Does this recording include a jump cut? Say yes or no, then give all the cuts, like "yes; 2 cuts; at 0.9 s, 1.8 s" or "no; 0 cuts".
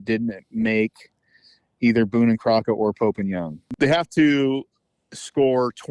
yes; 1 cut; at 3.7 s